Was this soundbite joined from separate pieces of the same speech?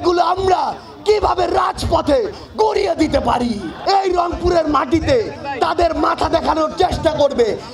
yes; 1 cut; at 3.7 s

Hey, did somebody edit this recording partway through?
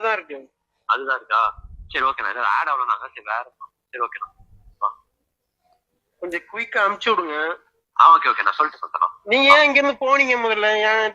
no; 0 cuts

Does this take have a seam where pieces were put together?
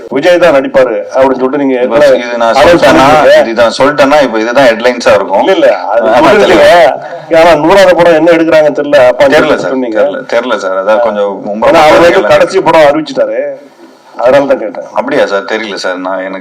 no; 0 cuts

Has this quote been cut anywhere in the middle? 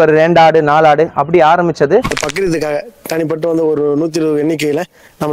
yes; 1 cut; at 2.2 s

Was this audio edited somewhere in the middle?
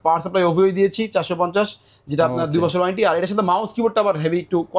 no; 0 cuts

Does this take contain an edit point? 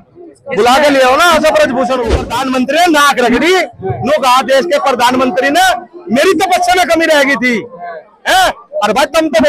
yes; 1 cut; at 2.3 s

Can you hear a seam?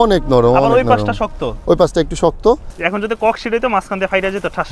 yes; 1 cut; at 2.7 s

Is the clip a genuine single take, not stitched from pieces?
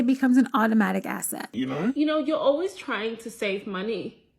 no; 1 cut; at 1.5 s

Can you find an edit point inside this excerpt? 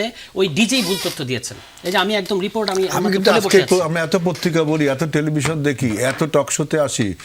no; 0 cuts

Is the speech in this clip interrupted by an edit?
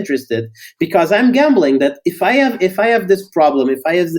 no; 0 cuts

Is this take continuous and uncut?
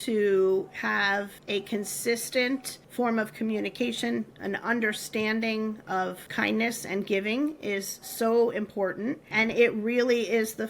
no; 4 cuts; at 1.4 s, 2.8 s, 5.9 s, 9.3 s

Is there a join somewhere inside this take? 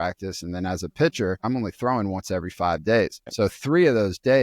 yes; 2 cuts; at 1.4 s, 3.3 s

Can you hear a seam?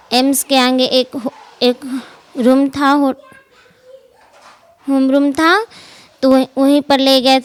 no; 0 cuts

